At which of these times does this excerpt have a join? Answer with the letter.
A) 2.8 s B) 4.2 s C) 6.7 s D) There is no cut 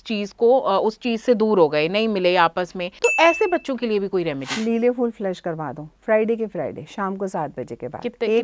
A